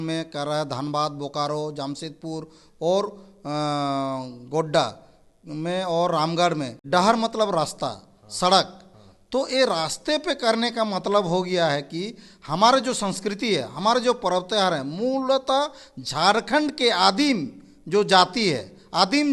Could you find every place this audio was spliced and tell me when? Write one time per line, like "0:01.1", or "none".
0:06.7

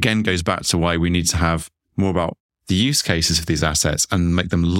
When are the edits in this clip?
0:01.8

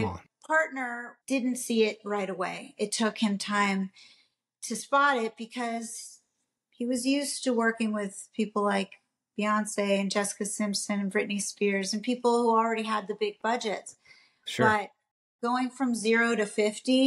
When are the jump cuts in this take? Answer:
0:01.1

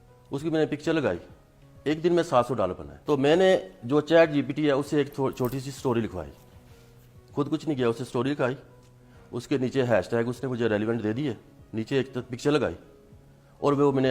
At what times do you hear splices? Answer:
0:02.9

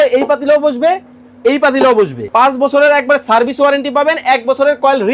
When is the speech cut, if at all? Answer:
0:02.2

